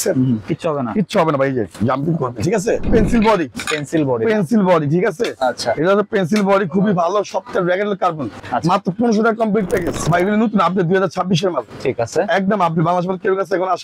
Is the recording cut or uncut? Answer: cut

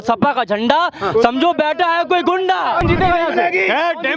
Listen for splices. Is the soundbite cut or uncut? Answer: cut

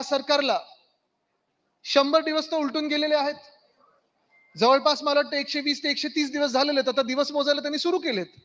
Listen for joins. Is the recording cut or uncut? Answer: uncut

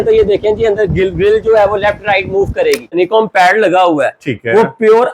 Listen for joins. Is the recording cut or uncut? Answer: cut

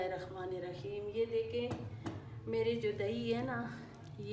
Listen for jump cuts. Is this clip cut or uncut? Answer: uncut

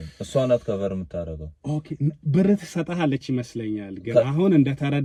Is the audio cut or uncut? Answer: uncut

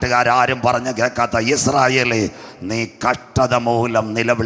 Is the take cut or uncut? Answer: uncut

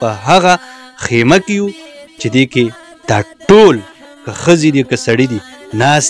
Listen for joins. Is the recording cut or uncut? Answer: uncut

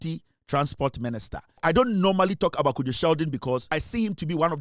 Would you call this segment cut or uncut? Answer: cut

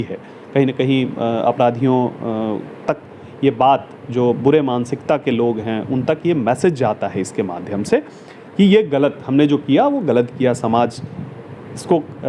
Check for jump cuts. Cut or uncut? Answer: uncut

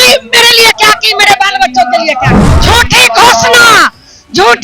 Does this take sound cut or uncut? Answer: cut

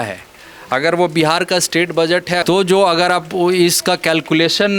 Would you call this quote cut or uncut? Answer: cut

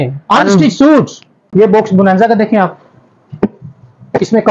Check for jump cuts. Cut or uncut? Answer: cut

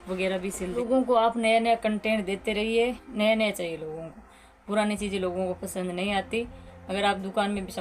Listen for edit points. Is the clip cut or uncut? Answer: cut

